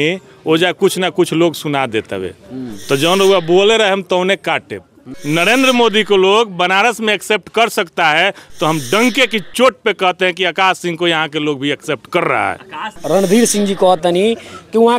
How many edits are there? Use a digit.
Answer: 2